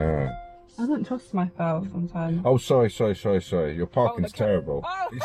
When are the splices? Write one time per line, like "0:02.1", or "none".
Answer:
none